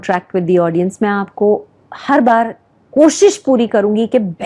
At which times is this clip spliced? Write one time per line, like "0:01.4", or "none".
none